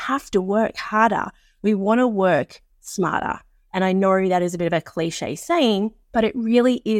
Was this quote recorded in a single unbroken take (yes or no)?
no